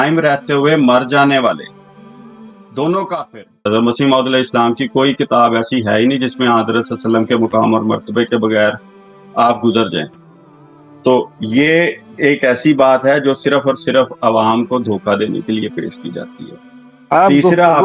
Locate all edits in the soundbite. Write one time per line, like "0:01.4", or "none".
0:03.6